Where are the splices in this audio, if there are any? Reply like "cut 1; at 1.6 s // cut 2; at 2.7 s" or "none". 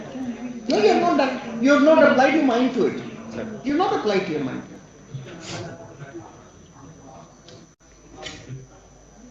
none